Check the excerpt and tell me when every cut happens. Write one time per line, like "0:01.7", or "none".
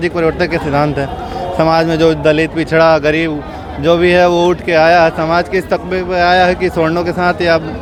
none